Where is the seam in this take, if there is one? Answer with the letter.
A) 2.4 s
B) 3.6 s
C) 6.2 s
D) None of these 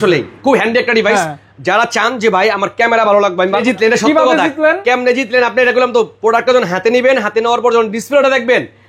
B